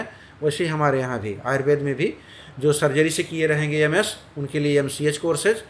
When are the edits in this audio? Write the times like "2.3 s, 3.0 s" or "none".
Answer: none